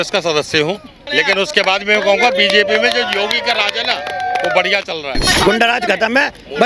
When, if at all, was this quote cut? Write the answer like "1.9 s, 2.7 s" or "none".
1.0 s, 5.4 s